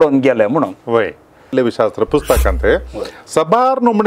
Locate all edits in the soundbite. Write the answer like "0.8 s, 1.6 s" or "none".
1.5 s